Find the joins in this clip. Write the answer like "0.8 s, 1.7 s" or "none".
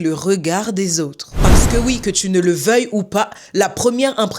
1.4 s